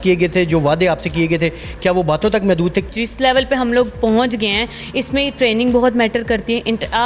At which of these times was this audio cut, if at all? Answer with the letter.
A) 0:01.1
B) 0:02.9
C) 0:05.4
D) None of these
B